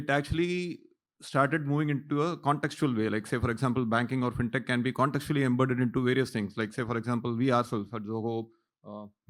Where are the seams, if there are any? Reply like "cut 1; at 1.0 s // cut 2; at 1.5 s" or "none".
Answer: none